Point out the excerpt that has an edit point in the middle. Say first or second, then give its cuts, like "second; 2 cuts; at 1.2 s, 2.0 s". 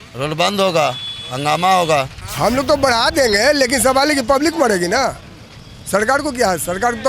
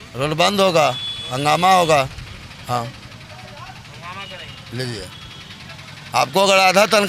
first; 1 cut; at 2.2 s